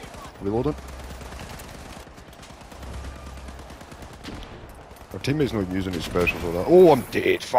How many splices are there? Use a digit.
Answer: 0